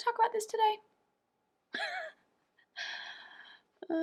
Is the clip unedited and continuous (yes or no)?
yes